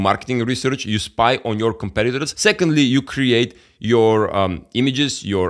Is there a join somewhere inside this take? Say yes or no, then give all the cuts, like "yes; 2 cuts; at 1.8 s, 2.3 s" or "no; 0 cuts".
yes; 1 cut; at 2.3 s